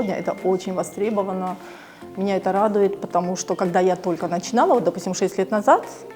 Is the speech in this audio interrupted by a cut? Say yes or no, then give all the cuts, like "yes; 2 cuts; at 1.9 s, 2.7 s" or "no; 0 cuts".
no; 0 cuts